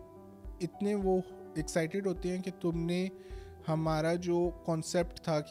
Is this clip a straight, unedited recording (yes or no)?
yes